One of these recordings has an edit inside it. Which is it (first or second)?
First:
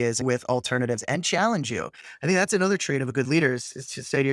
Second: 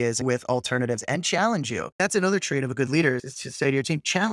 second